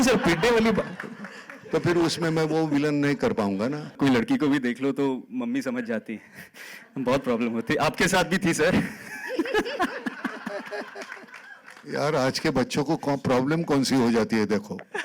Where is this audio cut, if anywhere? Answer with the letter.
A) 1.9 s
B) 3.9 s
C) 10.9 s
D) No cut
B